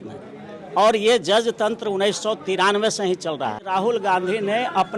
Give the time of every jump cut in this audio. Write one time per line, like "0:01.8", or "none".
0:03.6

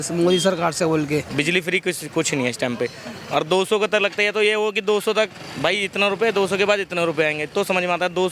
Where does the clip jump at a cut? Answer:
0:01.3

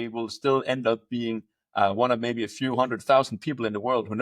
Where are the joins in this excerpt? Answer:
none

